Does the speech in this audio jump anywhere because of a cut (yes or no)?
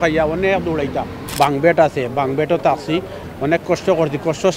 yes